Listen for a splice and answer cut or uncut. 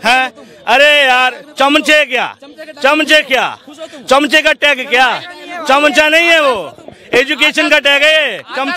uncut